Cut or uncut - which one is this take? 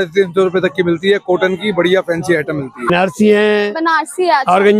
cut